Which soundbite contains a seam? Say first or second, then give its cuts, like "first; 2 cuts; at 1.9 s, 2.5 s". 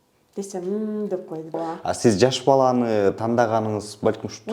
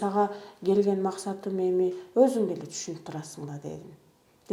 first; 1 cut; at 1.6 s